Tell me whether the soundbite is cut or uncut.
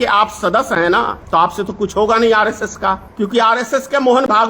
cut